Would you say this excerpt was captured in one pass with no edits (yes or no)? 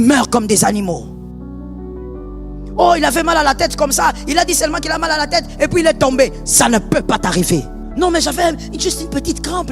no